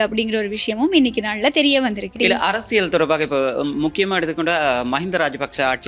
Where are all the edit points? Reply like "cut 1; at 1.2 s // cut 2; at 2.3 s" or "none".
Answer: cut 1; at 2.2 s